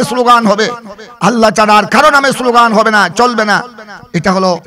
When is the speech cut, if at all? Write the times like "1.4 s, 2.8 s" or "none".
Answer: none